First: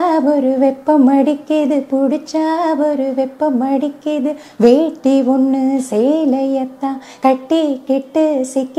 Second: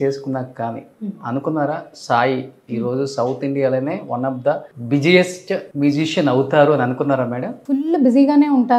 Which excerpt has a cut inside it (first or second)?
second